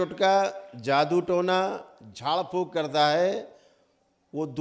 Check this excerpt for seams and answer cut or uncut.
uncut